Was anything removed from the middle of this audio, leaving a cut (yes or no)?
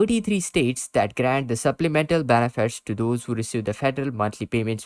no